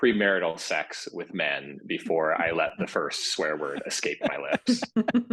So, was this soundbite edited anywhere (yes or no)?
no